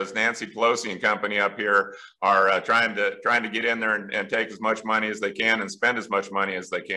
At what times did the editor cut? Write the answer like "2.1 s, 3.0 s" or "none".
none